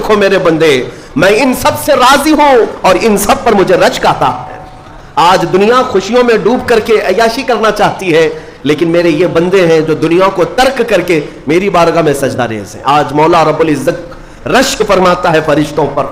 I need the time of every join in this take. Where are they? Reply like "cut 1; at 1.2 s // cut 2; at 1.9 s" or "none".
none